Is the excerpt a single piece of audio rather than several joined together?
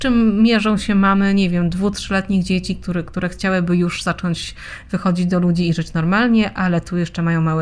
yes; 0 cuts

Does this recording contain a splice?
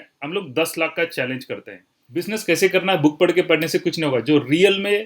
yes; 1 cut; at 2.3 s

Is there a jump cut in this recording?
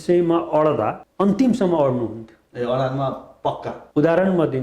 yes; 2 cuts; at 1.0 s, 3.7 s

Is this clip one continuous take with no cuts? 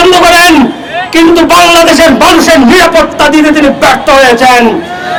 yes; 0 cuts

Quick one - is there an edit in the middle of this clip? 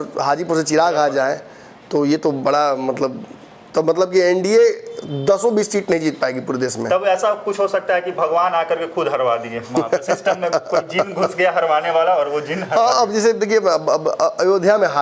no; 0 cuts

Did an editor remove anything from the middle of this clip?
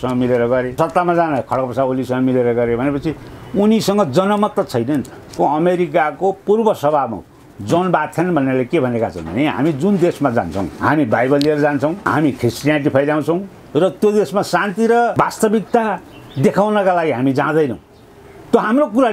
yes; 5 cuts; at 0.8 s, 5.3 s, 10.7 s, 12.0 s, 15.1 s

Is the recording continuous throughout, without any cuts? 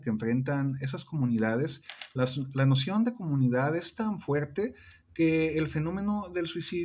yes; 0 cuts

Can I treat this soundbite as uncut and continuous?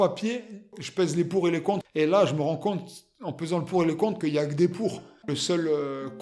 no; 2 cuts; at 1.8 s, 5.1 s

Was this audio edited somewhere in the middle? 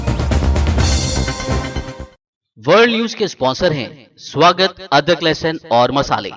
yes; 1 cut; at 2.1 s

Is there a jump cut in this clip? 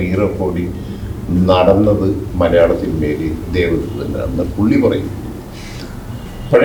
no; 0 cuts

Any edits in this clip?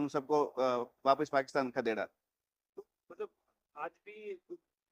no; 0 cuts

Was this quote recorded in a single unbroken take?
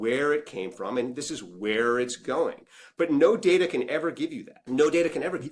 no; 1 cut; at 4.5 s

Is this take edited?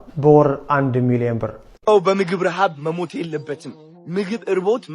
yes; 1 cut; at 1.7 s

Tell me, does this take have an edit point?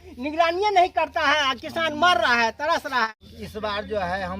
yes; 1 cut; at 3.1 s

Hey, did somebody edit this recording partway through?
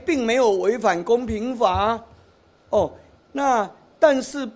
no; 0 cuts

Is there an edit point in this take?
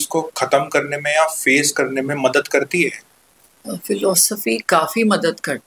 no; 0 cuts

